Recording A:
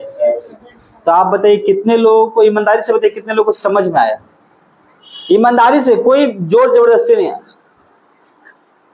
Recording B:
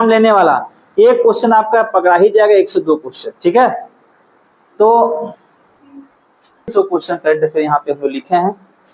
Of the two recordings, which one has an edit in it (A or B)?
B